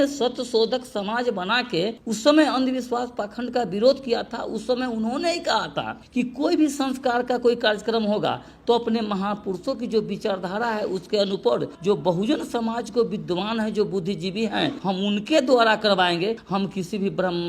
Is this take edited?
yes; 4 cuts; at 2.0 s, 11.7 s, 14.8 s, 16.4 s

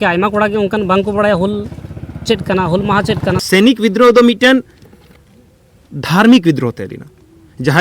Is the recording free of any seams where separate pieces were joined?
no; 1 cut; at 3.4 s

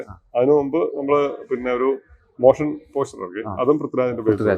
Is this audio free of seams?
yes; 0 cuts

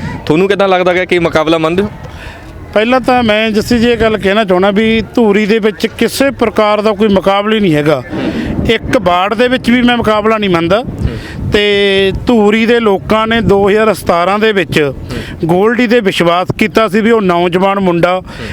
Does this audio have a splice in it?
no; 0 cuts

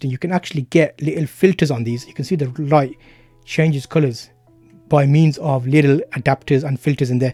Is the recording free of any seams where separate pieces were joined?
yes; 0 cuts

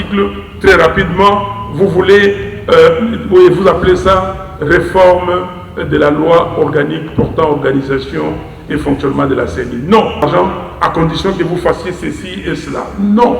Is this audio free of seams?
no; 1 cut; at 10.2 s

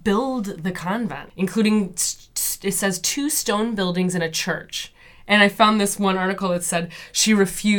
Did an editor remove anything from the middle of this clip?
no; 0 cuts

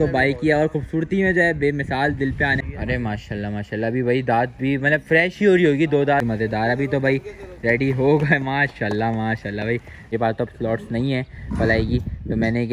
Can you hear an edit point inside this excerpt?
yes; 3 cuts; at 2.6 s, 6.2 s, 10.1 s

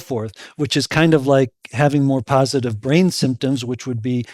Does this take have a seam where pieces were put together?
no; 0 cuts

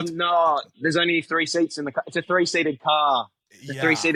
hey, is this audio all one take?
yes; 0 cuts

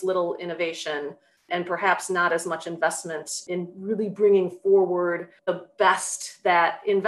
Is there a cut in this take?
yes; 3 cuts; at 1.5 s, 3.4 s, 5.3 s

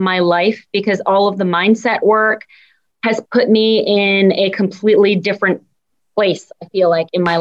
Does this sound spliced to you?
no; 0 cuts

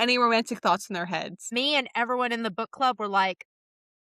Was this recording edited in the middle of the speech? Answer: yes; 1 cut; at 1.4 s

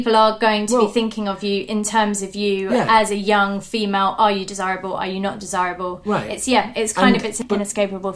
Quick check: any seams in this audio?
no; 0 cuts

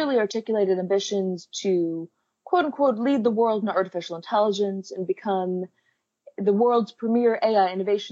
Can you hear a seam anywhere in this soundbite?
no; 0 cuts

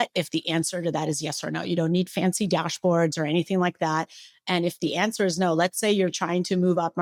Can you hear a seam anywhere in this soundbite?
no; 0 cuts

